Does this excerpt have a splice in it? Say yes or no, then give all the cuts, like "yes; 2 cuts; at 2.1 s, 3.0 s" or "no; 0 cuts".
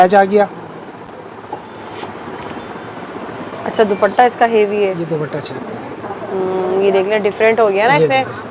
no; 0 cuts